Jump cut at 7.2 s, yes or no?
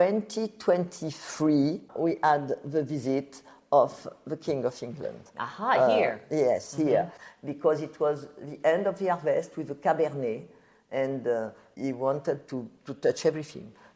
yes